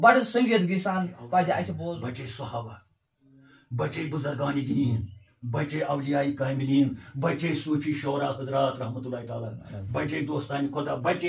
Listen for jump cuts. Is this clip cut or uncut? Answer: cut